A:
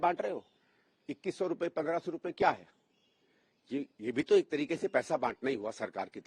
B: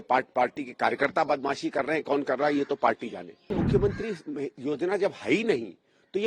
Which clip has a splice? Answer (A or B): B